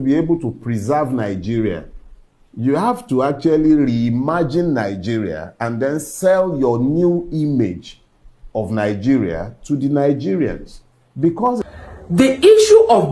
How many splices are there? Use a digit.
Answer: 1